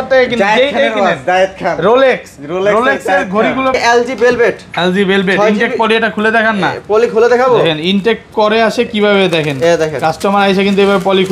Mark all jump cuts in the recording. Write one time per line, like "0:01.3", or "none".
0:03.8